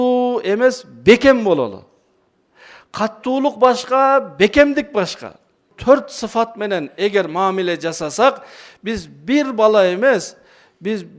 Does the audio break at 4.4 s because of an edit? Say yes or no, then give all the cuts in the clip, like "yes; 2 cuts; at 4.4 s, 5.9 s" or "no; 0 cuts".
no; 1 cut; at 5.7 s